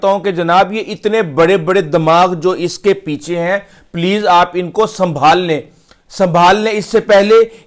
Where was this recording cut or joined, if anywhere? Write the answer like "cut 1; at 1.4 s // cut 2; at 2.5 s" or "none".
none